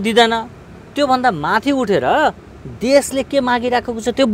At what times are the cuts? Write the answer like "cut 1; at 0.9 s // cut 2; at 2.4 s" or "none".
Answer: none